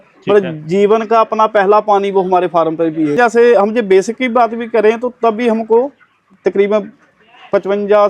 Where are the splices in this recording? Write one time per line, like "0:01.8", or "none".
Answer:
0:03.1